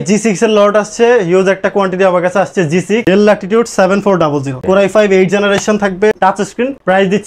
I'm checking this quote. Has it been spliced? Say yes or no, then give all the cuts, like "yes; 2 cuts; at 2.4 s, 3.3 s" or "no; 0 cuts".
yes; 2 cuts; at 3.0 s, 6.2 s